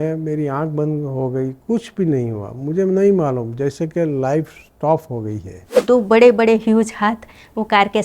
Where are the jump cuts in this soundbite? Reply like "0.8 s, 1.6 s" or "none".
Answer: 5.8 s